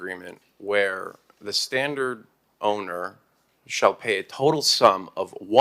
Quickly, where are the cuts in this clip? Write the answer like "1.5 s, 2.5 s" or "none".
none